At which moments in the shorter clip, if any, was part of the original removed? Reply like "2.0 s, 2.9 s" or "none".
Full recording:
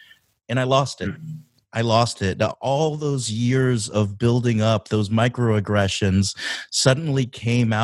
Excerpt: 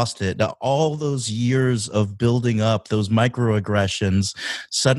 none